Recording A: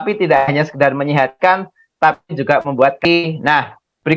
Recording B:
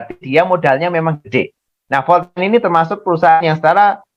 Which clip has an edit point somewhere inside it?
A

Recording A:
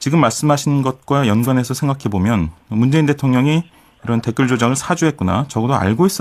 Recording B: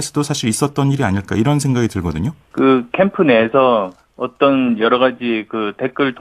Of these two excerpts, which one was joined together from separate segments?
B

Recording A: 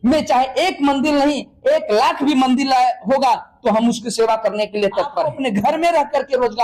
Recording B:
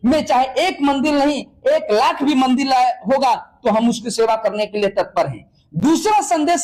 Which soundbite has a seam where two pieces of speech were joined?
A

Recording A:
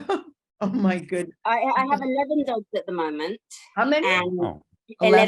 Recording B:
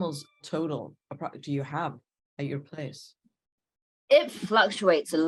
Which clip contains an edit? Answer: A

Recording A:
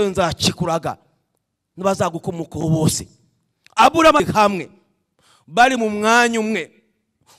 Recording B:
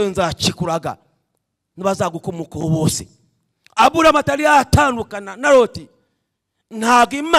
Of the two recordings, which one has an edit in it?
A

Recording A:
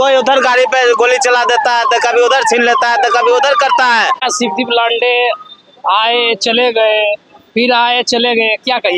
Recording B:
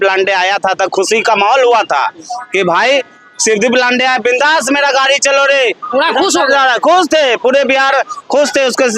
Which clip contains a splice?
A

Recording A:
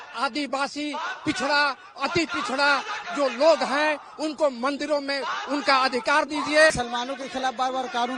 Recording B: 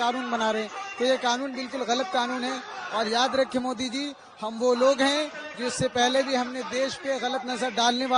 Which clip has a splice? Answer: A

